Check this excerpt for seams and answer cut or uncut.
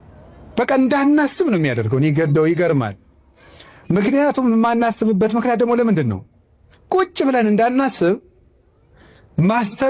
uncut